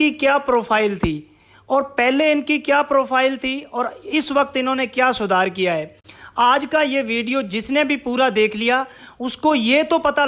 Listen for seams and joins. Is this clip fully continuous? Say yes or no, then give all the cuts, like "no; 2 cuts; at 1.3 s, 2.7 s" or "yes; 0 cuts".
yes; 0 cuts